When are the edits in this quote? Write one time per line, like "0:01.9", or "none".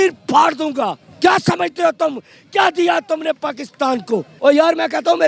0:01.0
0:04.3